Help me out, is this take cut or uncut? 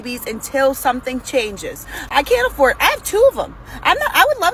uncut